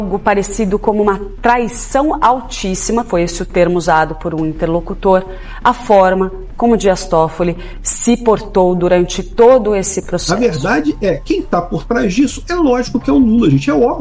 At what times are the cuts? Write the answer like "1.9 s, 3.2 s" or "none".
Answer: 10.2 s